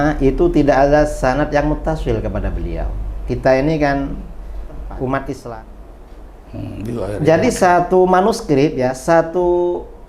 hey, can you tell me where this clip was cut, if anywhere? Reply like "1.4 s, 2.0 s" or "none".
5.5 s